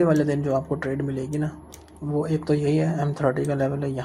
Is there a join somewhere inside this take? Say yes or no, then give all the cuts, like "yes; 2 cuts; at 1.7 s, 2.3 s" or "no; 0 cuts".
no; 0 cuts